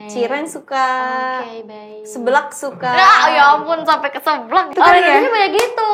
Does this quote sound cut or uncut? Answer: cut